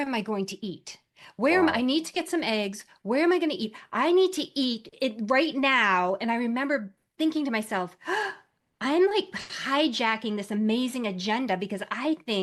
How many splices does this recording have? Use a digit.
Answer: 0